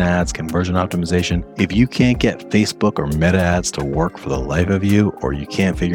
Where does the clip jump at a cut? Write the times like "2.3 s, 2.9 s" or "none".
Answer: 1.5 s